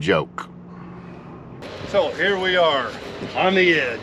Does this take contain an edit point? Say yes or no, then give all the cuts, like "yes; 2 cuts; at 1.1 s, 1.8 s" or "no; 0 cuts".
yes; 1 cut; at 1.6 s